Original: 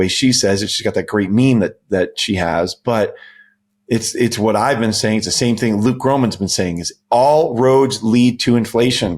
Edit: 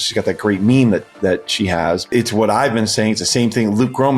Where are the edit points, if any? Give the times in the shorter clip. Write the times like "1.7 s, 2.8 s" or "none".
2.0 s

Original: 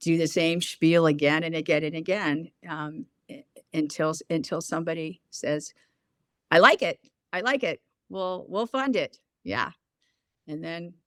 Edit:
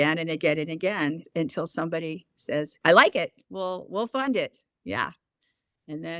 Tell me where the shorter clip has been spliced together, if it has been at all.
1.3 s, 2.7 s, 3.4 s

